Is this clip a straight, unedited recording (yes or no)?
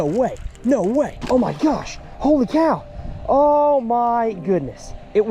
no